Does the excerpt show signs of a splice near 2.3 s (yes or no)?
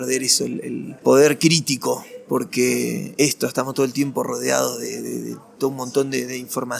no